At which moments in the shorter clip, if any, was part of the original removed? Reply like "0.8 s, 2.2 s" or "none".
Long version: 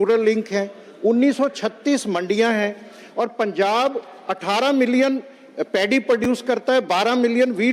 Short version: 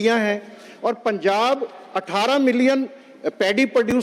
none